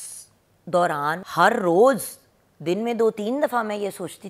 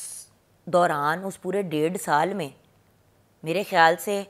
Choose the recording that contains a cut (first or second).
first